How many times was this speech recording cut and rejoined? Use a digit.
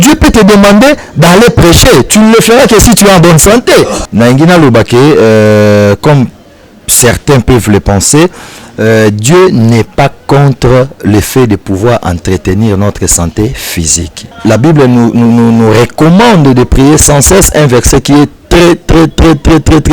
2